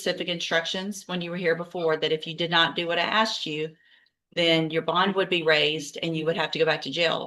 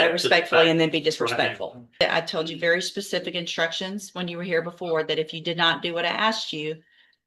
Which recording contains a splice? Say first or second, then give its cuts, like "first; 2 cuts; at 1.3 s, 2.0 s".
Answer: second; 1 cut; at 2.0 s